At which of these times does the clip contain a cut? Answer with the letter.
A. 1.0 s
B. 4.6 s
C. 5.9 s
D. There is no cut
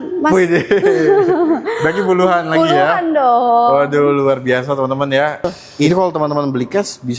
C